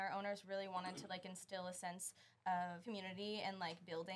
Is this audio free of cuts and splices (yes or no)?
no